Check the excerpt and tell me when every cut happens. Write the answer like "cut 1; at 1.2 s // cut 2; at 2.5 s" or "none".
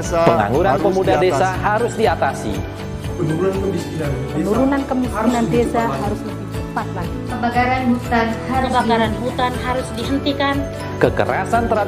none